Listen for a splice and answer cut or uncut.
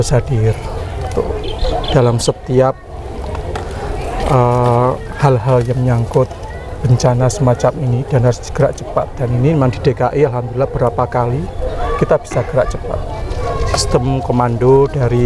uncut